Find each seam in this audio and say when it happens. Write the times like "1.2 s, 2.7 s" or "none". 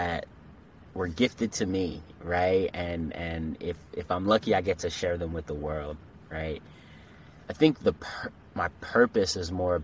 none